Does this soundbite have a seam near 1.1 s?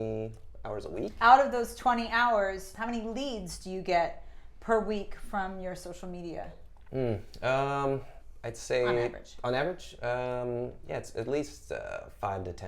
yes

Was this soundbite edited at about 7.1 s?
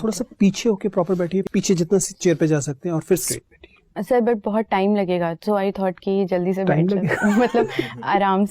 no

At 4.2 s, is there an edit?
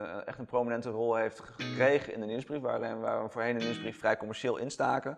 no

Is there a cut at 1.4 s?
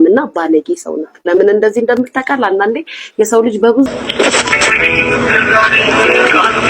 no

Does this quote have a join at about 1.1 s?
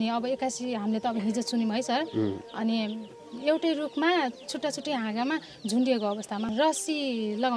no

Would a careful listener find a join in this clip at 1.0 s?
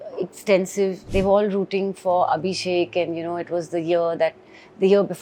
yes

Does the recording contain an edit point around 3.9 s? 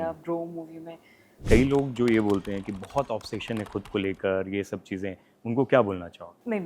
no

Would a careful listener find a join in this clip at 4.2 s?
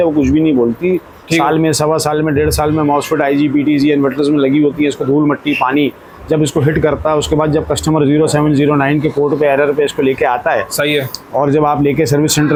no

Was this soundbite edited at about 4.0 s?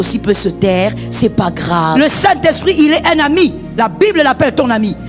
no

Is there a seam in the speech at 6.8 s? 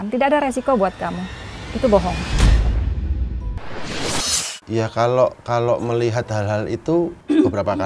no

